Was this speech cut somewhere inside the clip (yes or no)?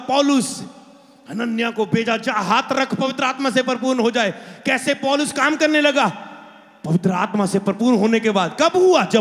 no